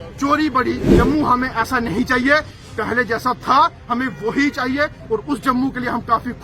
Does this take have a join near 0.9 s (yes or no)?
yes